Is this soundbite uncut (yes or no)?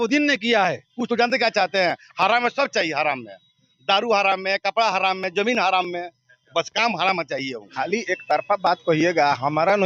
no